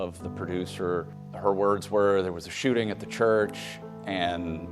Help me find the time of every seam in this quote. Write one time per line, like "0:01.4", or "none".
0:01.2